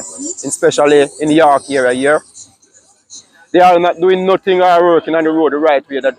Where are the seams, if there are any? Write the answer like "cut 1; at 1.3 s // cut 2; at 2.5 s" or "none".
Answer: none